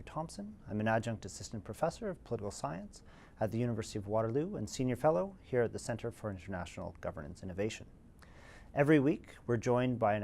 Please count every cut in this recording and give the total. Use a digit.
1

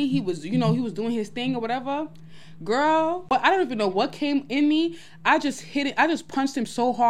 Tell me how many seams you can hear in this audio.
1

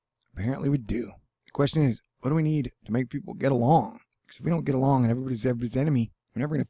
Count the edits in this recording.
0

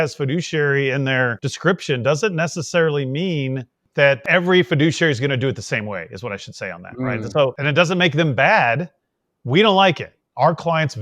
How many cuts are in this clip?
3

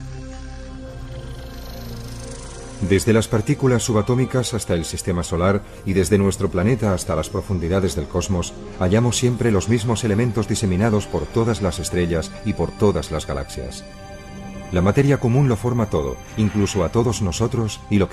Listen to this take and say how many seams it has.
0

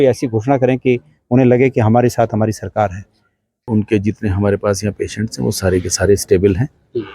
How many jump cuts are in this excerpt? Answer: 1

